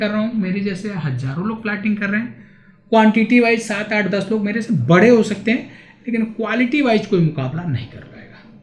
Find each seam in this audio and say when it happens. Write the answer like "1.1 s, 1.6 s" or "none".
none